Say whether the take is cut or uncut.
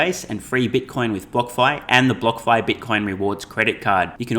uncut